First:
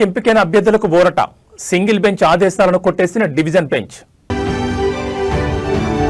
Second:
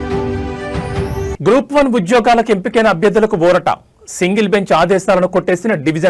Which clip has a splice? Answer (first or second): second